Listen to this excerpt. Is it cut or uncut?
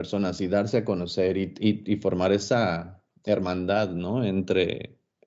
uncut